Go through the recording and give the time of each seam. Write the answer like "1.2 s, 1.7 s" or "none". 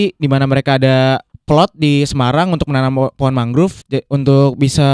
1.3 s, 3.8 s